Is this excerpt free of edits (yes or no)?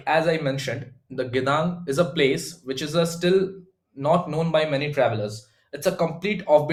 yes